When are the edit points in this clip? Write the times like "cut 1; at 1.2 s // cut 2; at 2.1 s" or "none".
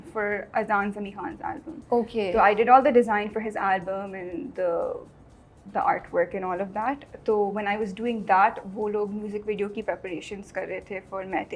none